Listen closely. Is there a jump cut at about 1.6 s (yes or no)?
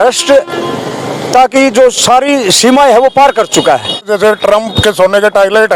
no